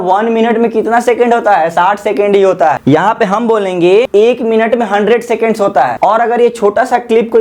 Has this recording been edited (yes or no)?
yes